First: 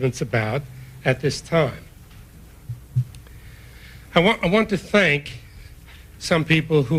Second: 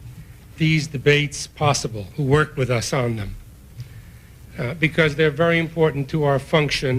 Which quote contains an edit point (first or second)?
second